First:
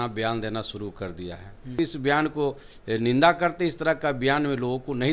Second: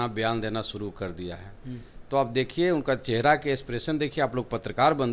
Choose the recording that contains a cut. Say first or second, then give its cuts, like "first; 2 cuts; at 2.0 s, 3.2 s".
first; 1 cut; at 1.8 s